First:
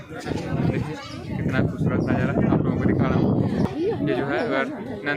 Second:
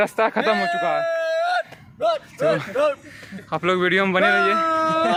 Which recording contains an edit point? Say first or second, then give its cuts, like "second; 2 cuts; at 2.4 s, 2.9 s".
first; 1 cut; at 3.7 s